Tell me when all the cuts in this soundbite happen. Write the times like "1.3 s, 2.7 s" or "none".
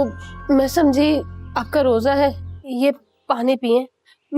2.5 s